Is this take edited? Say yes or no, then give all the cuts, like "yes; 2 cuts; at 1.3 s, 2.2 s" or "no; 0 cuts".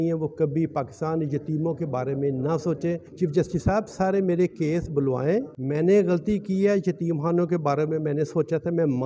yes; 2 cuts; at 3.1 s, 5.6 s